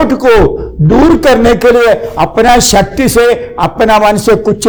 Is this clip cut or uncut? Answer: uncut